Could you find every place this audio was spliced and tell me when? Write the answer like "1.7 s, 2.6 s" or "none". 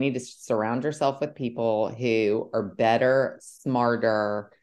none